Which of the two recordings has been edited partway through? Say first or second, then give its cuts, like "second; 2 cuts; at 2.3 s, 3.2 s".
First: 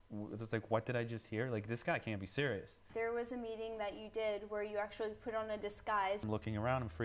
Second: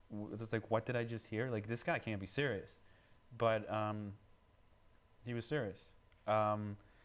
first; 2 cuts; at 2.8 s, 6.2 s